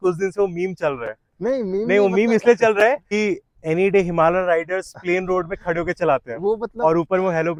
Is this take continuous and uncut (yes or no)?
yes